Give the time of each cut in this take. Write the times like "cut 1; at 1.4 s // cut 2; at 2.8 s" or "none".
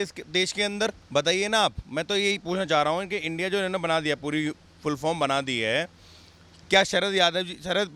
none